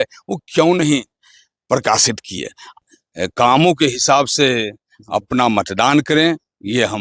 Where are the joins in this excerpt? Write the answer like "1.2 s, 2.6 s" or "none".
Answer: 2.8 s